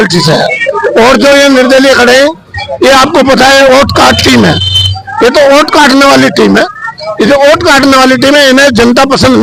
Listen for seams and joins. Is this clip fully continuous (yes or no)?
yes